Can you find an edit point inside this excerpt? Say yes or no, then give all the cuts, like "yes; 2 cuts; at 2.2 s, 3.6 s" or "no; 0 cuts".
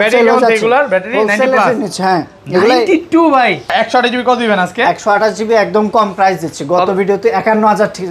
yes; 1 cut; at 3.7 s